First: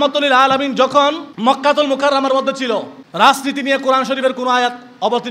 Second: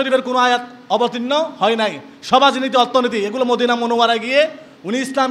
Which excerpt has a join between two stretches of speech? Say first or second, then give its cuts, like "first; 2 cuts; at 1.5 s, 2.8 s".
first; 2 cuts; at 1.3 s, 3.0 s